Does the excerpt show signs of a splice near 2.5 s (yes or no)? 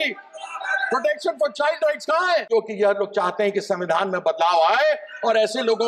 yes